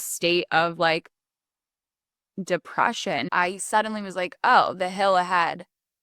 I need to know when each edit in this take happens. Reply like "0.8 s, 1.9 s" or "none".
3.3 s